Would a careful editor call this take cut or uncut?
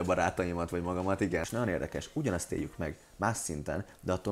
cut